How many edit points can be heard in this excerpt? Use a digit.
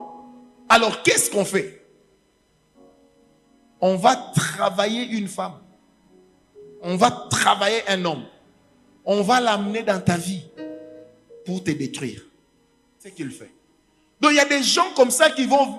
1